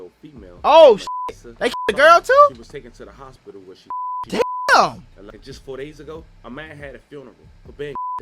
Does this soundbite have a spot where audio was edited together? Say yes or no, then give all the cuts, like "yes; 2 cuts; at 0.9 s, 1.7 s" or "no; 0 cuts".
yes; 2 cuts; at 4.2 s, 5.2 s